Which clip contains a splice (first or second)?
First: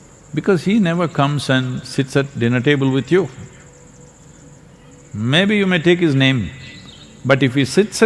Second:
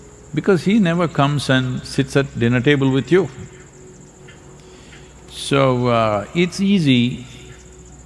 second